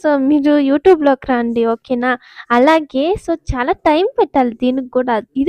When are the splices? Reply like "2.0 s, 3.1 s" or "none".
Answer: none